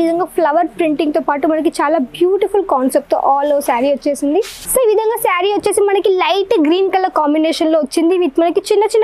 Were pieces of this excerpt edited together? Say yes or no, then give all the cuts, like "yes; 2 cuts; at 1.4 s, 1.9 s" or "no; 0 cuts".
yes; 1 cut; at 4.6 s